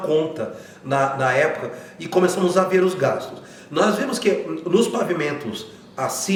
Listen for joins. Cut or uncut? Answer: uncut